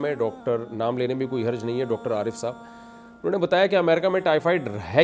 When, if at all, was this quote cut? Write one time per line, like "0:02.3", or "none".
none